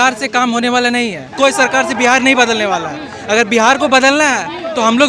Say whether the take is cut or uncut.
cut